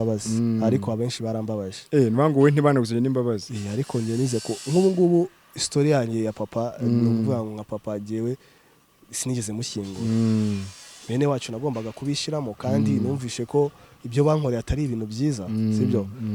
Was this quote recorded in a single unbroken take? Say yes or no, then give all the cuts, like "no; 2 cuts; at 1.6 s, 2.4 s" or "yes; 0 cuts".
yes; 0 cuts